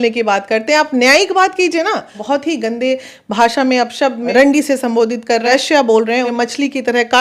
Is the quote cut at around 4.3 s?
yes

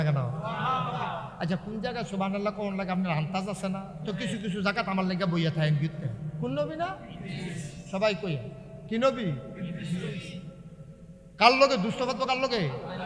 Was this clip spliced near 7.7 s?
no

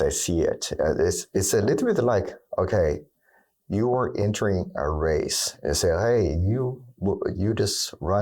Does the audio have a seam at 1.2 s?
yes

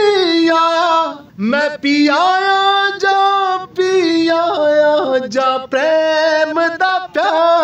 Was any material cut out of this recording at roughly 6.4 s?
no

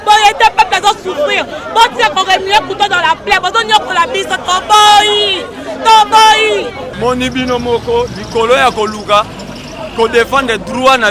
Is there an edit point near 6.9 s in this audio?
yes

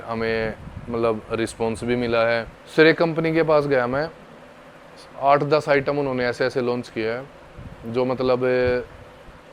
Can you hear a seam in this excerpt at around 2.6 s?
yes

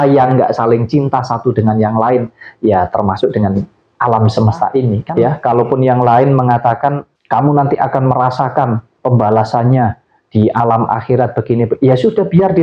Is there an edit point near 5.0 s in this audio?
yes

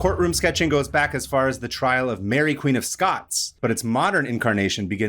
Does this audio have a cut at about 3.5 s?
yes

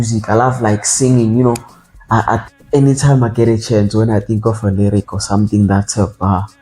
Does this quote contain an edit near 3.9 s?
no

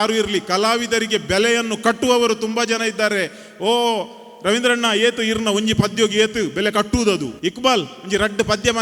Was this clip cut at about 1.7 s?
no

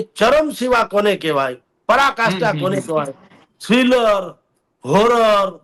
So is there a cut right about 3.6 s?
no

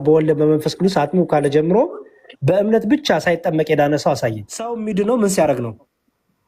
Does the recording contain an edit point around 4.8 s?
yes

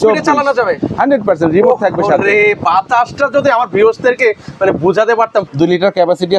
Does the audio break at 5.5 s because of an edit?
yes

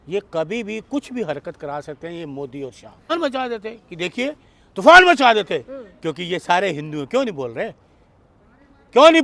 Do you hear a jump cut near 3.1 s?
yes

